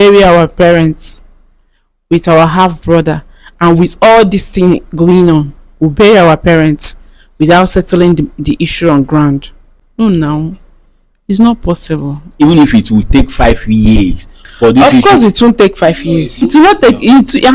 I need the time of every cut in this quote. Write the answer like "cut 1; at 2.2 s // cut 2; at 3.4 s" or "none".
cut 1; at 12.3 s // cut 2; at 16.4 s